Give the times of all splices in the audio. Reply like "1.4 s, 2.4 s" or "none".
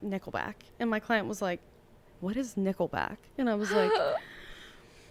none